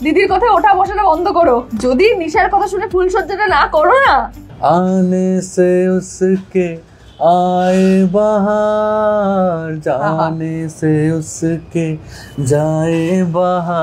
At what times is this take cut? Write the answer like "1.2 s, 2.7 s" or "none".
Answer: 1.7 s, 4.4 s